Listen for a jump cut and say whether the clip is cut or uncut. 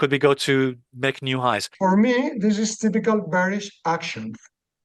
cut